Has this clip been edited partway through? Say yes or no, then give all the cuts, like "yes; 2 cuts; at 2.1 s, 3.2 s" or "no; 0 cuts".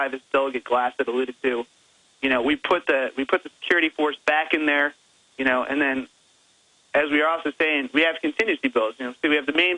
no; 0 cuts